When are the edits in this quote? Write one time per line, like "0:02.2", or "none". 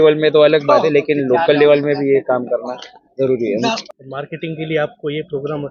0:03.8